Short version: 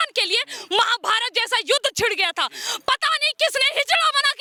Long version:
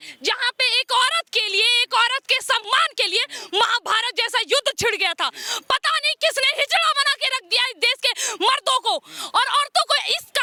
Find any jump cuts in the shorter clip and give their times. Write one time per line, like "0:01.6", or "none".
none